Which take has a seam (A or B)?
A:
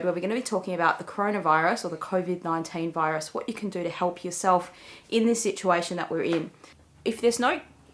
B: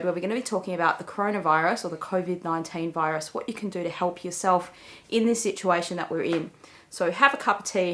A